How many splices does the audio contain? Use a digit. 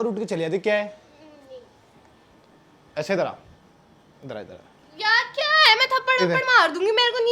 0